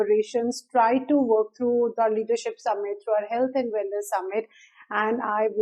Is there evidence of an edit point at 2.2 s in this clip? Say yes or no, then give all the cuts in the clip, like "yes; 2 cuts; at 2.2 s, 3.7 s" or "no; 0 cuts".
no; 1 cut; at 4.7 s